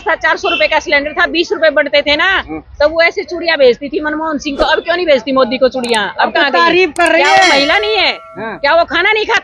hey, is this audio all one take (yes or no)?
yes